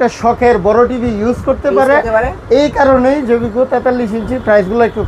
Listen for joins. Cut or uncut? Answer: uncut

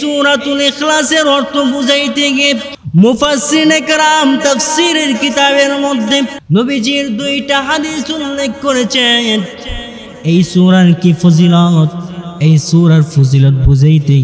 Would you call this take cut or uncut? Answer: cut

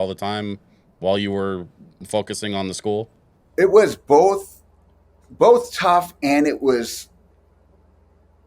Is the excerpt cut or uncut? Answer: uncut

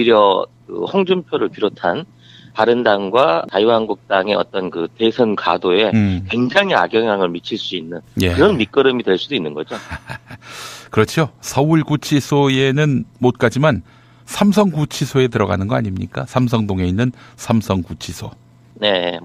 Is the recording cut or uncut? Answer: uncut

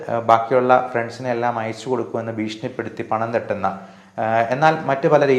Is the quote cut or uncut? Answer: uncut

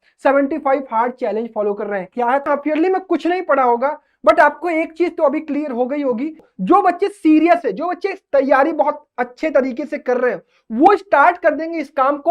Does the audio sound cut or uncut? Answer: cut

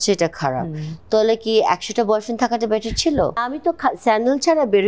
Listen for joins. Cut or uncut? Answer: cut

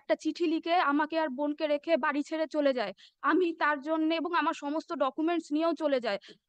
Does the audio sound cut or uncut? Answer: uncut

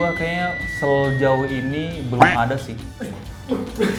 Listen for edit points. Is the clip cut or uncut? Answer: uncut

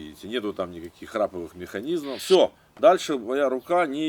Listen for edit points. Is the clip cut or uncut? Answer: cut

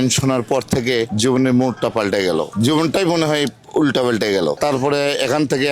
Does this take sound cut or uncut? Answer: uncut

